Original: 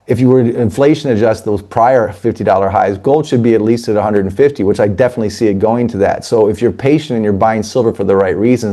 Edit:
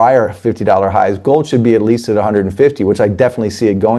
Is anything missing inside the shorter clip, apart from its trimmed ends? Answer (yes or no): no